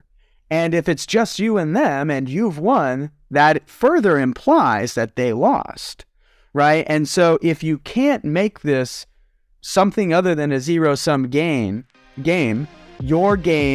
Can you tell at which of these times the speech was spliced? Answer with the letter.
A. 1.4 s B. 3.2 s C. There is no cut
C